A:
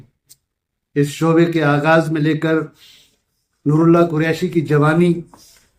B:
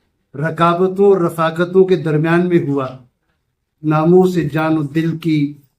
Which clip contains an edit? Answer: B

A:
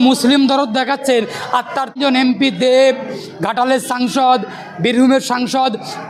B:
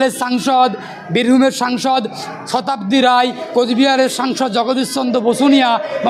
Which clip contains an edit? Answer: A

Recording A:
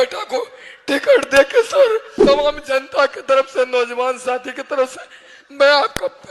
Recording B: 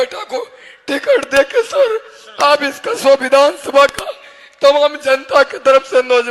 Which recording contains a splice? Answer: A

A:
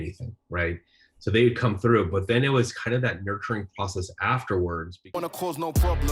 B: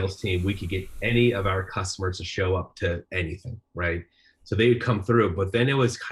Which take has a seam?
A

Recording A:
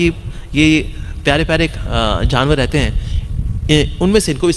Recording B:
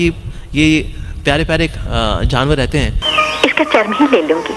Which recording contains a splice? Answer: A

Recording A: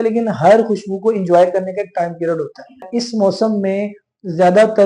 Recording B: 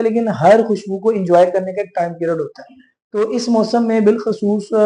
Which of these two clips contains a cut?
A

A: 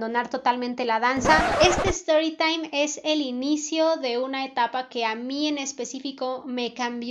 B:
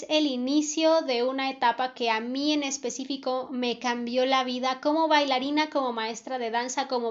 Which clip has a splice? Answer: A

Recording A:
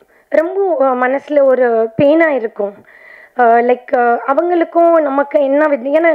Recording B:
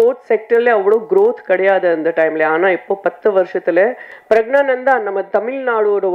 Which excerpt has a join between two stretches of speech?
B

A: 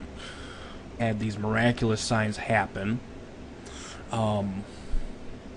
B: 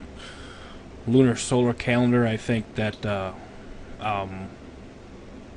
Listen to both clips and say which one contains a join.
B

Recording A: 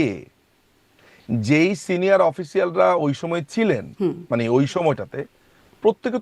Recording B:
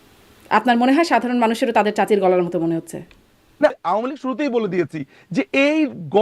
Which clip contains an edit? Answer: B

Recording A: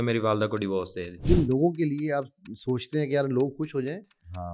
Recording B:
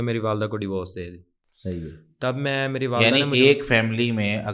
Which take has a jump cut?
A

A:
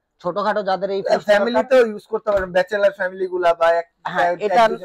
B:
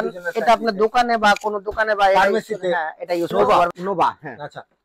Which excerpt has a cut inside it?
B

